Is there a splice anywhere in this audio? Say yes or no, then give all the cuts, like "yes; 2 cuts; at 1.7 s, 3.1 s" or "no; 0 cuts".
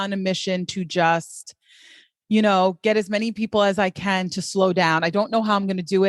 no; 0 cuts